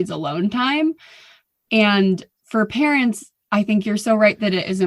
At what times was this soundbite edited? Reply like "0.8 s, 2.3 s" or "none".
2.3 s